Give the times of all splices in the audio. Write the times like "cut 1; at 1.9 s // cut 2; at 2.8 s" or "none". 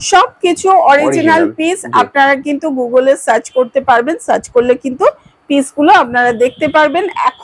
none